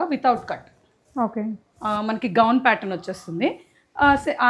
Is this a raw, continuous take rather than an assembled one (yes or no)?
yes